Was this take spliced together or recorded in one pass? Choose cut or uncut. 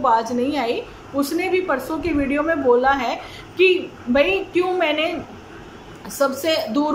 uncut